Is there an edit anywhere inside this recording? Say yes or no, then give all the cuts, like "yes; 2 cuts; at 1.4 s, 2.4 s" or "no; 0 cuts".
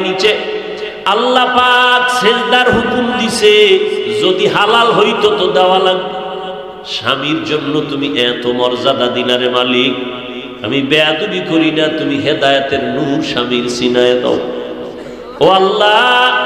no; 0 cuts